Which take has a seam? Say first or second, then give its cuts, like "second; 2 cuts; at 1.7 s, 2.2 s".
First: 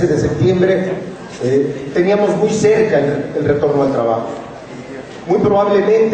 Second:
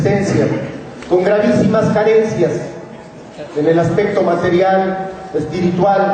second; 1 cut; at 4.8 s